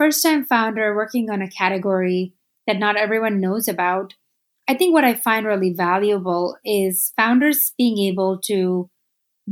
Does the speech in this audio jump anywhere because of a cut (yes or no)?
no